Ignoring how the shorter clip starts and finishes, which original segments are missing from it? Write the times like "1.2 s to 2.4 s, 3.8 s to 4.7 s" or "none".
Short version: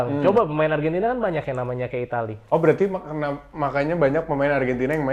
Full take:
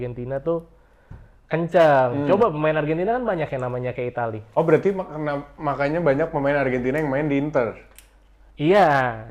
none